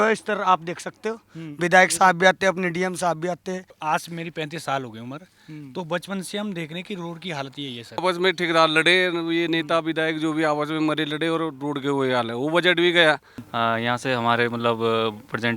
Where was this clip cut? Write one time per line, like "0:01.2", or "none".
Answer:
0:03.7
0:08.0
0:13.5